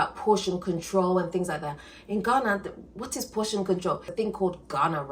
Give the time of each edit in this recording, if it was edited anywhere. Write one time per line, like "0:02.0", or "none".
0:04.1